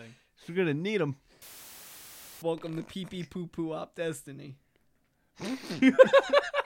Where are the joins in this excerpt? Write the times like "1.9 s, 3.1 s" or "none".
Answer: 1.9 s

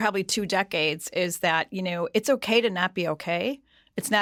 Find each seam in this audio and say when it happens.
none

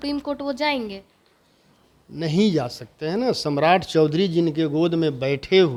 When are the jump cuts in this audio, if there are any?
none

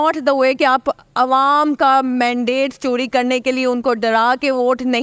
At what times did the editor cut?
none

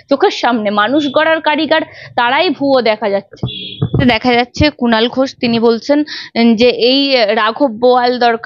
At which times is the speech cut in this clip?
4.0 s

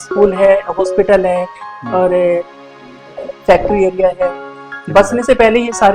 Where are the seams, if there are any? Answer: 4.8 s

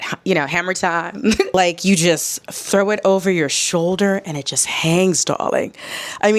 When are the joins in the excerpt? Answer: 1.6 s

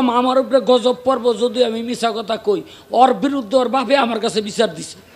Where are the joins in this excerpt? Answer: none

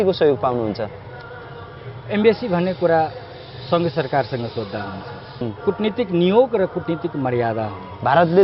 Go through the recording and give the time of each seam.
5.5 s

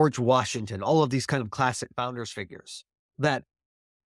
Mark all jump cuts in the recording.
none

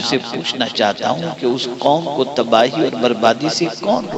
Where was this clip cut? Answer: none

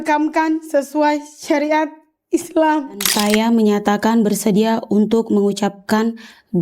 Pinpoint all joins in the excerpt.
3.1 s

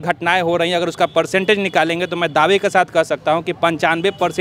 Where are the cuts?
none

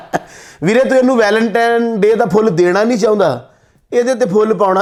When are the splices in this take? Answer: none

